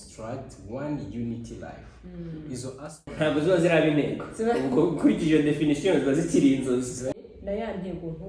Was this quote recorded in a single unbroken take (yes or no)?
no